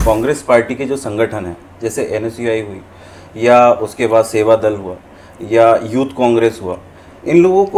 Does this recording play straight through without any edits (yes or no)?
yes